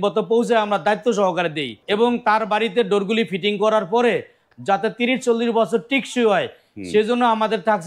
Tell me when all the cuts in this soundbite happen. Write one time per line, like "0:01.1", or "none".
0:01.7